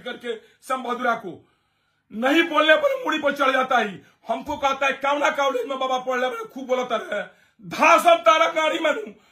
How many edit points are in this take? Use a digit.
0